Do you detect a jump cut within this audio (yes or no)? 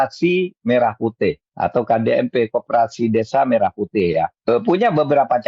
yes